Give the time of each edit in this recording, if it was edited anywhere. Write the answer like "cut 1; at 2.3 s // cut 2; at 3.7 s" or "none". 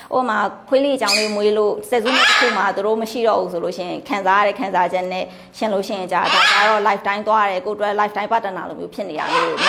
none